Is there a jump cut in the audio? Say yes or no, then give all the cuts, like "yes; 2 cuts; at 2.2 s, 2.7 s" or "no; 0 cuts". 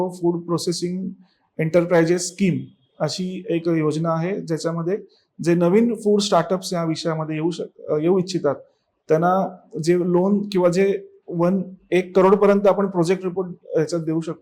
no; 0 cuts